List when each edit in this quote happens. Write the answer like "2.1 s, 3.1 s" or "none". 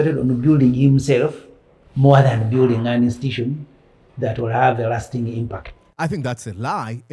none